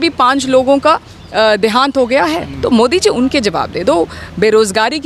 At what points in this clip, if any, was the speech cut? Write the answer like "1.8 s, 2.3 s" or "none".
2.5 s

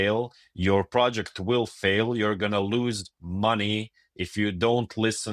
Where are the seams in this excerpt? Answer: none

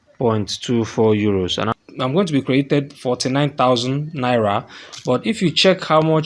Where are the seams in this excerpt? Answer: 1.6 s

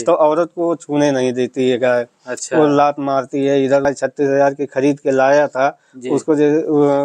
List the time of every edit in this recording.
3.9 s

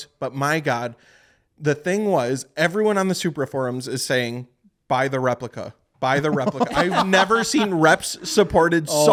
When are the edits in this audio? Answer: none

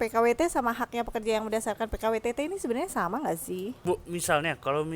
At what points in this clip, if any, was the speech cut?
3.8 s

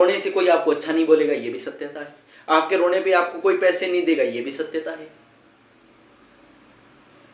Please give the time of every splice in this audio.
none

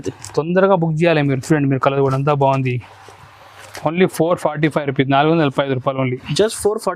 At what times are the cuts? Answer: none

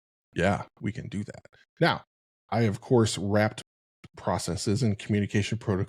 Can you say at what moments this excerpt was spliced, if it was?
none

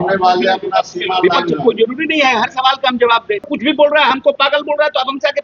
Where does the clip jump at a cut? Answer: 3.5 s

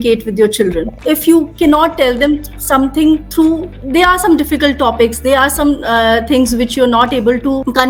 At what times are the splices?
none

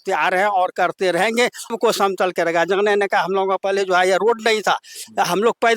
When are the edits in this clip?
1.7 s

